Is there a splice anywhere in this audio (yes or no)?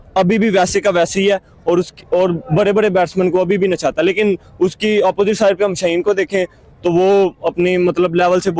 no